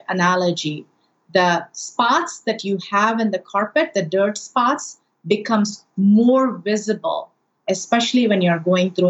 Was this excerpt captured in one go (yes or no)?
no